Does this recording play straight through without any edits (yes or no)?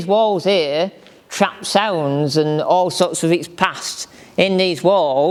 yes